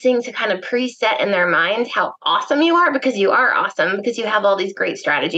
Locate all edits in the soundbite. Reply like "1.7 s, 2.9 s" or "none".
none